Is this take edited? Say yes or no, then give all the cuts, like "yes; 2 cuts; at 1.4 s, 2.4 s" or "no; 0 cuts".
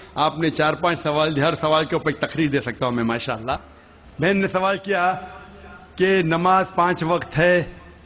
yes; 1 cut; at 4.8 s